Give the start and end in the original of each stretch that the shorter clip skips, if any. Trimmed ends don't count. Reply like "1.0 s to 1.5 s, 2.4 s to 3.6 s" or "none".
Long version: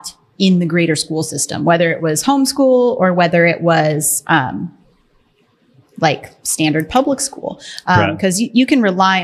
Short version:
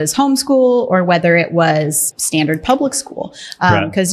4.1 s to 6.3 s